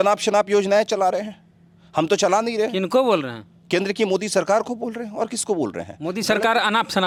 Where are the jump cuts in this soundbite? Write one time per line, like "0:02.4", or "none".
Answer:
none